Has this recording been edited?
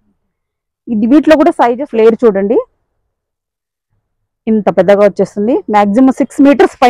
yes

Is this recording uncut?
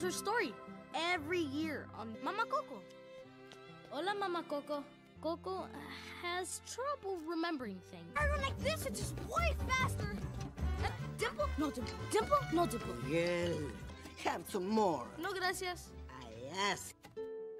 no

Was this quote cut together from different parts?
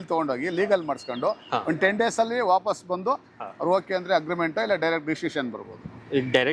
no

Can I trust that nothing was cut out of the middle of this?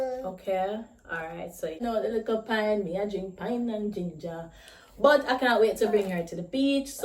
no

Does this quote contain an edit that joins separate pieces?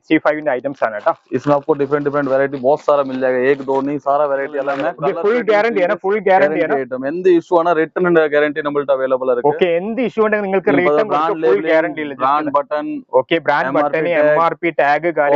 yes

